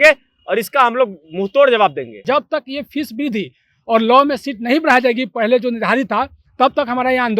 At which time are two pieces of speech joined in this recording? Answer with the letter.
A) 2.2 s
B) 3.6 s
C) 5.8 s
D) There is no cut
A